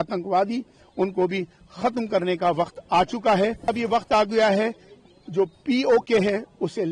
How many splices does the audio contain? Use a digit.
1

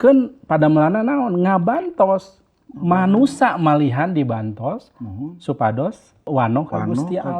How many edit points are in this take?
1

